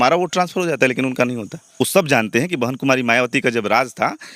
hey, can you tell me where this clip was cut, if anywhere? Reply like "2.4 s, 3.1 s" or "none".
1.8 s